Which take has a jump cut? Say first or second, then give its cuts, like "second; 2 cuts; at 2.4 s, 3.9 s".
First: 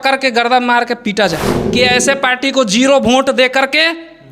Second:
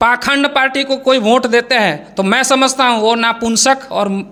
first; 1 cut; at 1.6 s